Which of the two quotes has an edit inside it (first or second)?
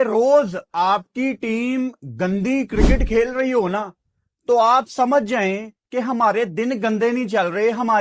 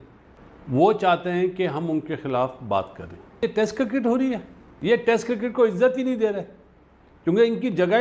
second